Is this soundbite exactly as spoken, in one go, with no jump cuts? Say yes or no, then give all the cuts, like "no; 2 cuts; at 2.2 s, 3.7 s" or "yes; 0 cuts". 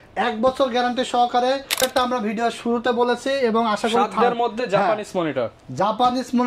no; 1 cut; at 1.8 s